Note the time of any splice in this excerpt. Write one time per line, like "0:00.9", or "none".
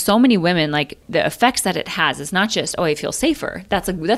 0:01.0